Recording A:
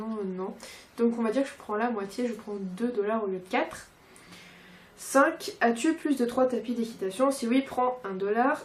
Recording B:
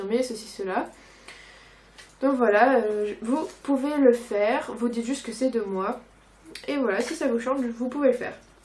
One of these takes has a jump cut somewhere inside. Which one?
A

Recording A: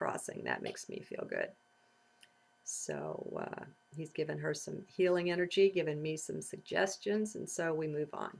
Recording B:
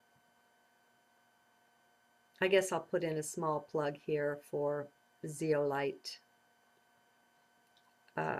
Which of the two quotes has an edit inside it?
A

